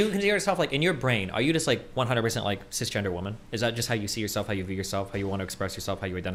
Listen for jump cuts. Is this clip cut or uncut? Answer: uncut